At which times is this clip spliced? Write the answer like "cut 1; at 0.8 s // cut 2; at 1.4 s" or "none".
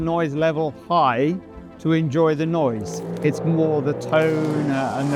none